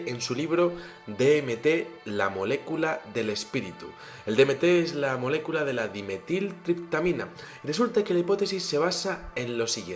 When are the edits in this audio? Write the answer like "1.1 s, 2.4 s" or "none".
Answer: 4.3 s